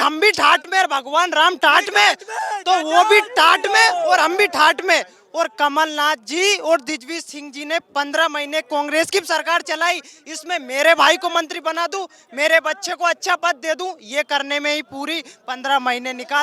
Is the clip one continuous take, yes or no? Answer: yes